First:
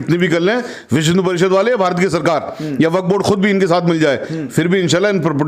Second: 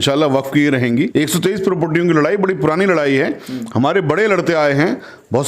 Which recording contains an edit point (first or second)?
second